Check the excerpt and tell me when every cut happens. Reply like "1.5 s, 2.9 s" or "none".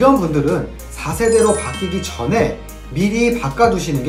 none